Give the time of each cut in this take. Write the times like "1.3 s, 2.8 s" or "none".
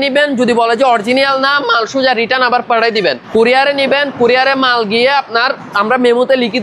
3.2 s